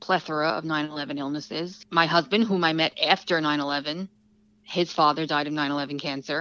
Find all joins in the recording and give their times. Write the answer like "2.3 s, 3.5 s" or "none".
1.8 s

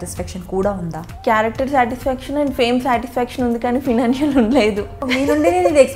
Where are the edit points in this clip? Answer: 1.0 s, 5.0 s

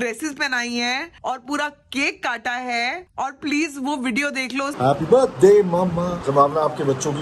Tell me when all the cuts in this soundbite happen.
6.3 s

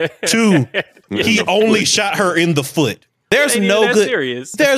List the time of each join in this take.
1.0 s, 3.1 s

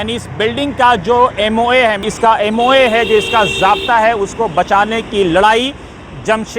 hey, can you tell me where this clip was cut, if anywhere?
2.1 s

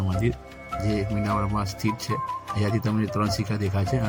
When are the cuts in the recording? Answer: none

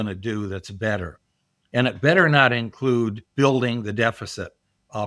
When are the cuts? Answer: 3.2 s

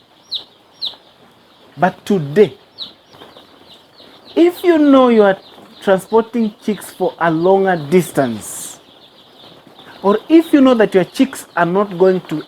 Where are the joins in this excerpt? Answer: 3.1 s

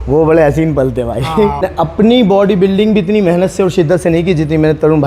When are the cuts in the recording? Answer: 1.6 s

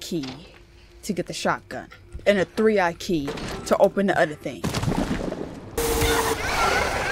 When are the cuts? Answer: 5.8 s

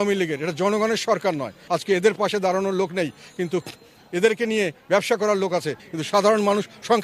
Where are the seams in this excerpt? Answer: 1.5 s, 5.8 s

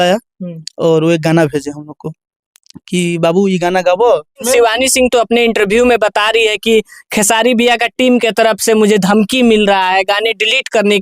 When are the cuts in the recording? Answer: 4.4 s

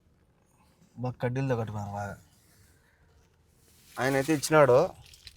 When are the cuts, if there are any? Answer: none

